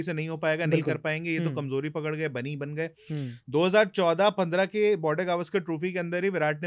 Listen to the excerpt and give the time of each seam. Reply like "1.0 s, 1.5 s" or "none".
none